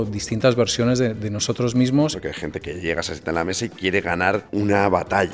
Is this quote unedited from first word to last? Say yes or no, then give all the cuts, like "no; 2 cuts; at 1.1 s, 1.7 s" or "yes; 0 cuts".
no; 2 cuts; at 2.2 s, 4.5 s